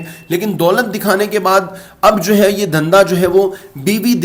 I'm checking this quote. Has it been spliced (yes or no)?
no